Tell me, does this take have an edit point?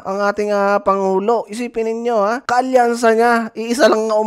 yes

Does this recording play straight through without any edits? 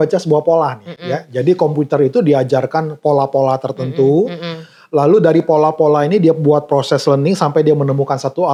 yes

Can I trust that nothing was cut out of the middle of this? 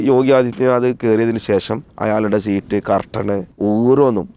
no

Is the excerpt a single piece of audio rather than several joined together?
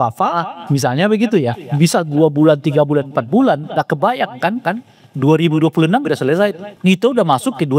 no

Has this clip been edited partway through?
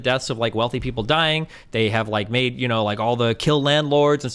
no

